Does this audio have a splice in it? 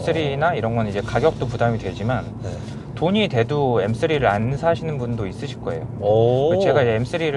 no; 0 cuts

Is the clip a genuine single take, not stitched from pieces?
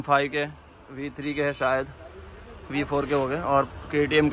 yes; 0 cuts

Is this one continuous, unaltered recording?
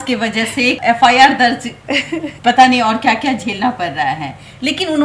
yes; 0 cuts

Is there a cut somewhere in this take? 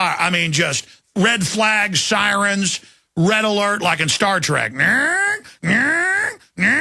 yes; 1 cut; at 1.4 s

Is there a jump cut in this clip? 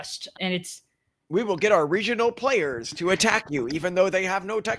no; 0 cuts

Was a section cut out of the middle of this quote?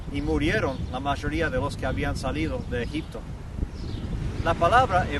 yes; 1 cut; at 2.2 s

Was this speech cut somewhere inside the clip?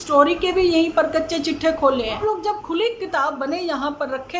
yes; 1 cut; at 2.2 s

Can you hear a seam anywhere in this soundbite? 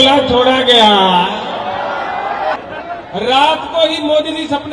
yes; 1 cut; at 2.6 s

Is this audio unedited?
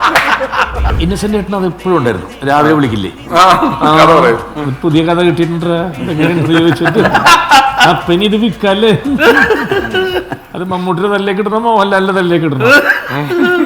no; 1 cut; at 0.9 s

